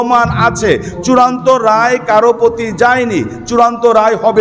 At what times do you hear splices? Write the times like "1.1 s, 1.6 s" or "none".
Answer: none